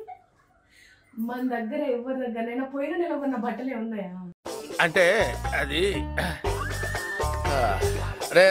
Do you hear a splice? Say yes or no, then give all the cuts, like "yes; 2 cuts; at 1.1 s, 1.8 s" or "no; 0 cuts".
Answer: no; 0 cuts